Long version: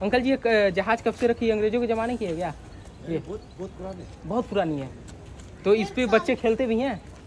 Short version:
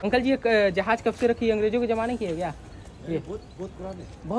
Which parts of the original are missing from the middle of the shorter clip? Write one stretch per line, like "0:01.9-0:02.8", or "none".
none